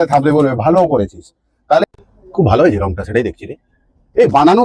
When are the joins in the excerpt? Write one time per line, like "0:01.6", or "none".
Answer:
0:01.8